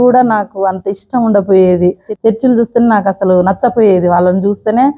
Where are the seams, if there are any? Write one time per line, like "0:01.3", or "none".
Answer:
0:02.1